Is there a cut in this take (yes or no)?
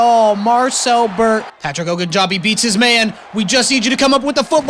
yes